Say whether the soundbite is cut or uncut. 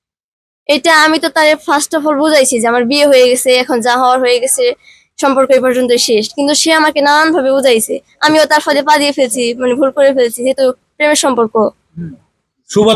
uncut